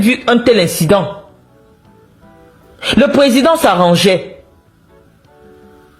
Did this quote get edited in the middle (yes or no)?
no